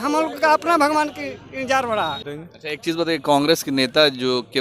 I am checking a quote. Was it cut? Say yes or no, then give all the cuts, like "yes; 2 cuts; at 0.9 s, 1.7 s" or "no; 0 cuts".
yes; 1 cut; at 2.3 s